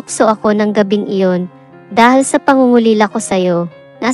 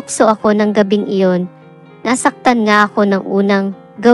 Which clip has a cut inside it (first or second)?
second